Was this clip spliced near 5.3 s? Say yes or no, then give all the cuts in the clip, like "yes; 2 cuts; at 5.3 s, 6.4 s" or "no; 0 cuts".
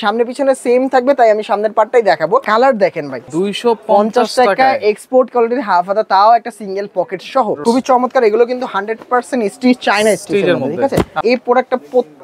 no; 4 cuts; at 2.5 s, 3.2 s, 7.6 s, 11.2 s